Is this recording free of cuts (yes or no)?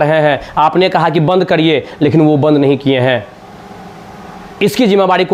yes